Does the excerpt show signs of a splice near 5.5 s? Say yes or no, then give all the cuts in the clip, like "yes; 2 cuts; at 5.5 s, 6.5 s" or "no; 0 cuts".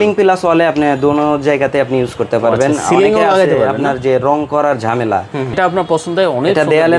yes; 1 cut; at 5.5 s